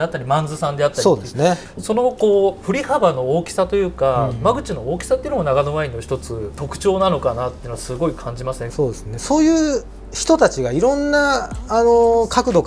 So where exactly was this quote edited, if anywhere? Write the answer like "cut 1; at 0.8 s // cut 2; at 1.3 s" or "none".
cut 1; at 1.6 s // cut 2; at 6.7 s // cut 3; at 8.7 s